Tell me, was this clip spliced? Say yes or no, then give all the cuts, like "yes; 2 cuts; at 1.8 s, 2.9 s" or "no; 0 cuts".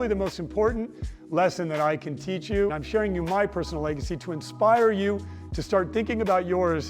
yes; 1 cut; at 2.7 s